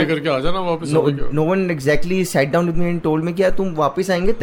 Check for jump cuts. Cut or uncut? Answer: uncut